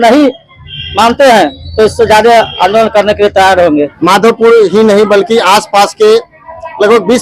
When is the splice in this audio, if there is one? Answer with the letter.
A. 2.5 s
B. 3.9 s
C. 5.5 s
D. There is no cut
B